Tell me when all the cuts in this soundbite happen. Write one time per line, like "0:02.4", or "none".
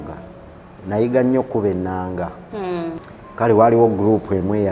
0:03.0